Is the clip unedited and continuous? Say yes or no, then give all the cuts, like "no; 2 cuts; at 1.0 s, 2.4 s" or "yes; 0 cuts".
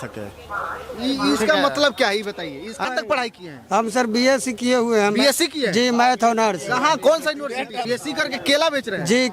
no; 2 cuts; at 2.8 s, 7.8 s